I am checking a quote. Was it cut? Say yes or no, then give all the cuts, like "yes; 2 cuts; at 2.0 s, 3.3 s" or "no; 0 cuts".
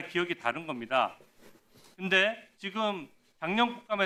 no; 0 cuts